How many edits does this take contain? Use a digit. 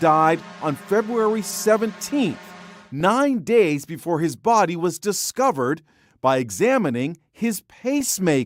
0